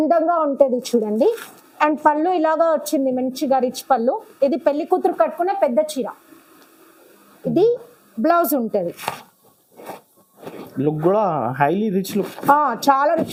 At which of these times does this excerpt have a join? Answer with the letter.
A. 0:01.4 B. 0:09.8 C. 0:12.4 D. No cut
D